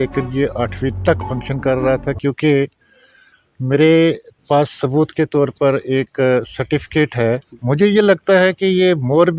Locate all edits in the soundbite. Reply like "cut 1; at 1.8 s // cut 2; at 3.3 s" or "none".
cut 1; at 7.5 s

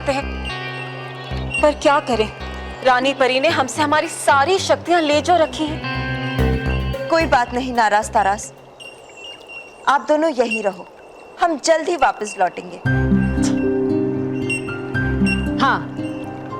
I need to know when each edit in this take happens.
cut 1; at 5.8 s

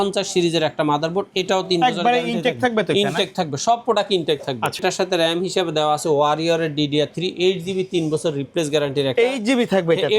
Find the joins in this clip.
cut 1; at 4.8 s

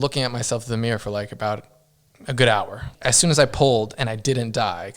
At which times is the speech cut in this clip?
cut 1; at 2.9 s

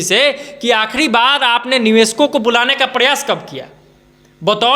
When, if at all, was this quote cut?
none

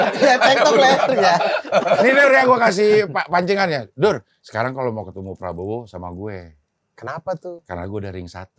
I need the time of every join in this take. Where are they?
none

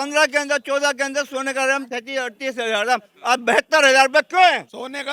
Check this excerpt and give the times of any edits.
none

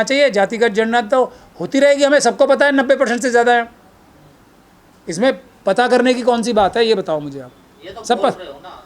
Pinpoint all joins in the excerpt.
none

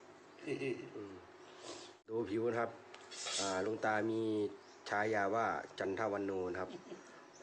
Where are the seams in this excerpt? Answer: cut 1; at 2.1 s

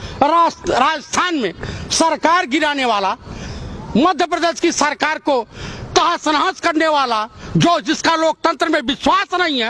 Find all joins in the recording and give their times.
none

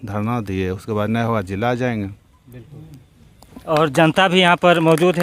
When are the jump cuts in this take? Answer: none

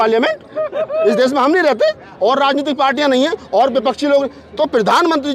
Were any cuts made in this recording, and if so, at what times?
none

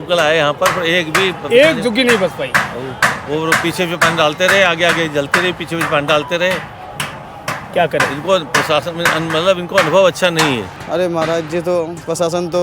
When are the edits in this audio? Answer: cut 1; at 10.7 s

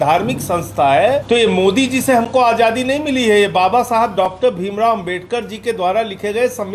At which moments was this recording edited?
cut 1; at 1.2 s

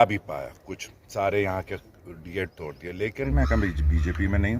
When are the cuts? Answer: cut 1; at 3.3 s

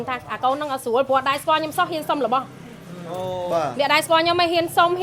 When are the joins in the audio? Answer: none

